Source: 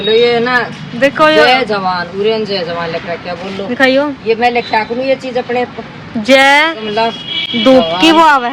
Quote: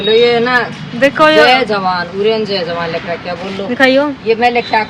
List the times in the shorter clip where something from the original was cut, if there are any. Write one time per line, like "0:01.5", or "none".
none